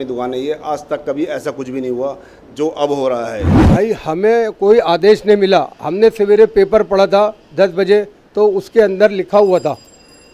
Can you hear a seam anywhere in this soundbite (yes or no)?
yes